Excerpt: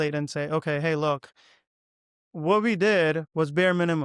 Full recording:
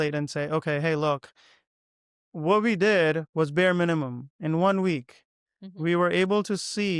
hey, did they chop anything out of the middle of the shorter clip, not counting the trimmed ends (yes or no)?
no